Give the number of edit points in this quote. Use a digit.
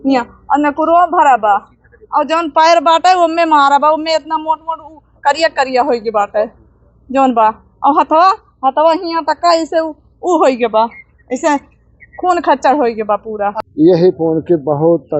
1